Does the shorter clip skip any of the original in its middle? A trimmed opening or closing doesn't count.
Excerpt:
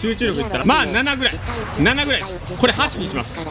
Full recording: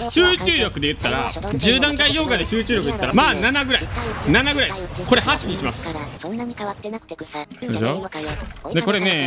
no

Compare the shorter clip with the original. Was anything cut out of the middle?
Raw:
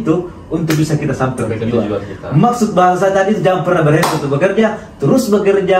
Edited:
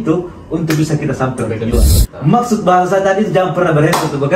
yes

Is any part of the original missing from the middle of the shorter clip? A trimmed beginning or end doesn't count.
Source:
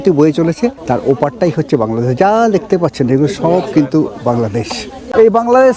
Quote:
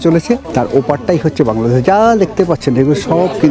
no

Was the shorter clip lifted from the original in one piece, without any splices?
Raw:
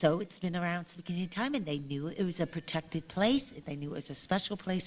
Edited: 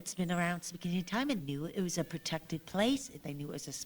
no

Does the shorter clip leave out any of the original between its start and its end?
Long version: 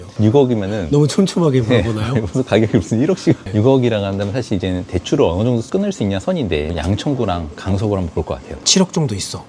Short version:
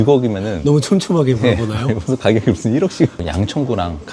yes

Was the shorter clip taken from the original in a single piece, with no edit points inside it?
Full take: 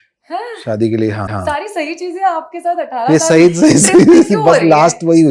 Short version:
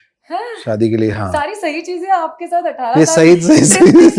no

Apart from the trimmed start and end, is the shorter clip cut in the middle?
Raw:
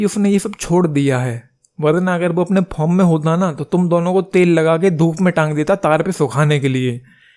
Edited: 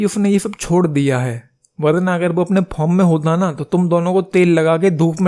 no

